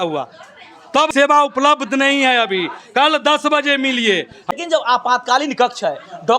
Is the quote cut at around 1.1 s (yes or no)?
yes